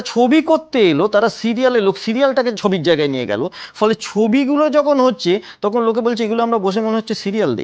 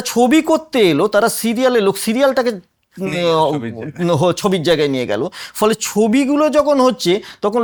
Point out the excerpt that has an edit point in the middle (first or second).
first